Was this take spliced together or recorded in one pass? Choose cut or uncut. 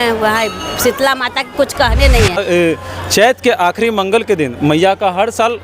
cut